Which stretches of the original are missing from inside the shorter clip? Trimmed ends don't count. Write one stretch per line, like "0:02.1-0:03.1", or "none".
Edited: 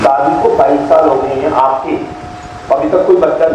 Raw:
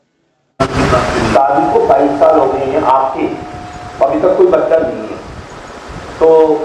none